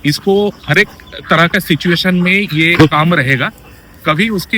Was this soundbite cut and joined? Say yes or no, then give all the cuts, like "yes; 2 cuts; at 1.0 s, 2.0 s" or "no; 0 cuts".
no; 0 cuts